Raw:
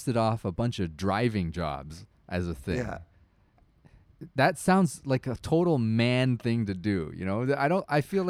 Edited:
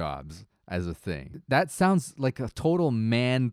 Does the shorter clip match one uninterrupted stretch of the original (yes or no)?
no